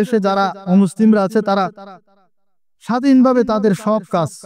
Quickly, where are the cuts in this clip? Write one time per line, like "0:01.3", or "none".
none